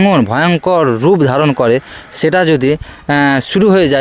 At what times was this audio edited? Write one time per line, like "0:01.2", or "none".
none